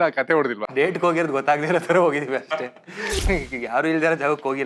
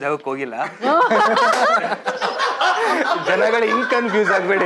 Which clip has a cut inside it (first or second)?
first